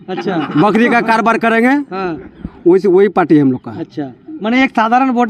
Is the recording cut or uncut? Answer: uncut